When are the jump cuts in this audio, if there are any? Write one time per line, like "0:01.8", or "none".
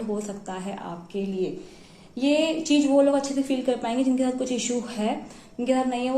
none